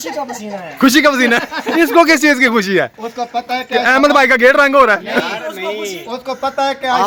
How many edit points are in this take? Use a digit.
0